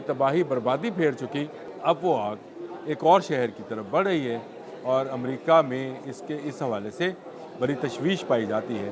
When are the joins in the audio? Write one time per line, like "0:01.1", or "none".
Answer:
0:01.6